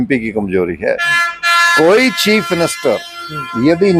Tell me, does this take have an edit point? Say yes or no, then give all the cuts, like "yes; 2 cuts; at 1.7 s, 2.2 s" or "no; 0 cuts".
no; 0 cuts